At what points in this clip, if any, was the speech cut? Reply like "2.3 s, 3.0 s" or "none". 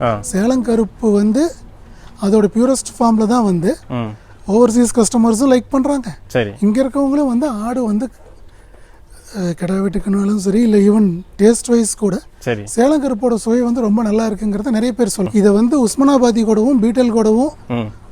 15.3 s